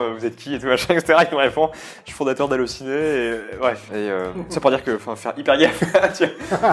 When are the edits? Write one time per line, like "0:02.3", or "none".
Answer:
0:03.8